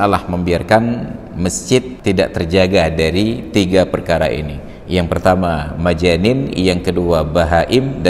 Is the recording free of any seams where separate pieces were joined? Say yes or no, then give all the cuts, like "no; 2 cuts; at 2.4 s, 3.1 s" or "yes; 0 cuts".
no; 1 cut; at 1.9 s